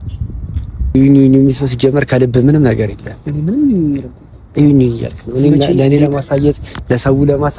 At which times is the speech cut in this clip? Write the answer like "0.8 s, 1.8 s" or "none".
1.0 s